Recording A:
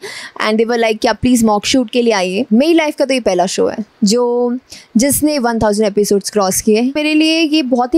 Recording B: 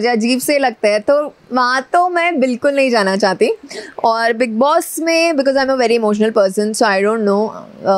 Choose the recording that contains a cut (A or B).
A